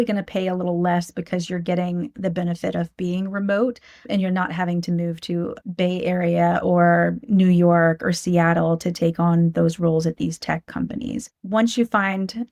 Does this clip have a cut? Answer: yes; 3 cuts; at 4.0 s, 5.6 s, 11.3 s

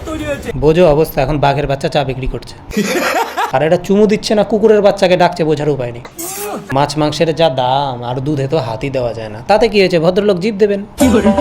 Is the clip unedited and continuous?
no; 2 cuts; at 3.5 s, 6.7 s

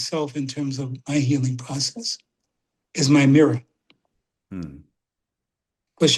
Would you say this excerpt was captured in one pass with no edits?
yes; 0 cuts

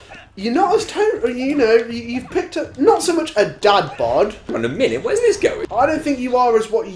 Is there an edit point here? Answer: yes; 2 cuts; at 4.5 s, 5.6 s

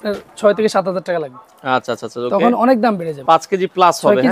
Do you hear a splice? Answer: yes; 1 cut; at 3.1 s

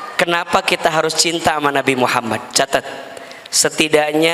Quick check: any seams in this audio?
no; 0 cuts

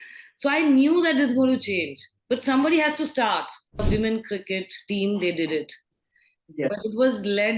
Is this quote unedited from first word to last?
no; 1 cut; at 3.8 s

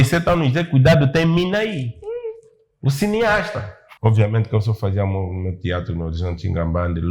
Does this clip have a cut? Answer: yes; 1 cut; at 3.8 s

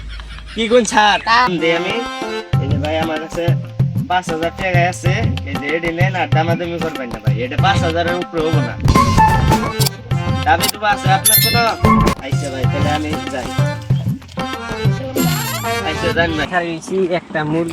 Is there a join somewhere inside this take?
yes; 2 cuts; at 1.5 s, 16.5 s

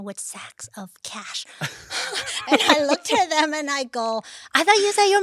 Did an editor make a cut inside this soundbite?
no; 0 cuts

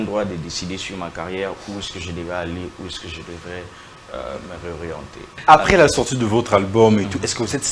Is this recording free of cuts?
no; 1 cut; at 5.3 s

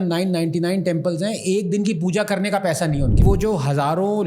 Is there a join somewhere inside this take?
yes; 1 cut; at 3.2 s

